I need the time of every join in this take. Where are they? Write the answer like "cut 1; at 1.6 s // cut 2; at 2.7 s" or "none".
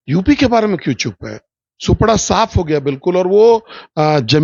none